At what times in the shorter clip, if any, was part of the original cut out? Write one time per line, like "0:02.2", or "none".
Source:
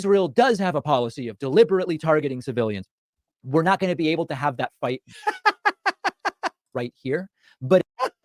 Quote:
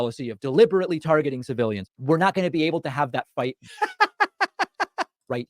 0:01.9